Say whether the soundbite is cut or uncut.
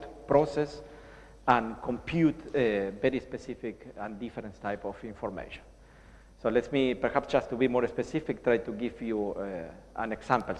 cut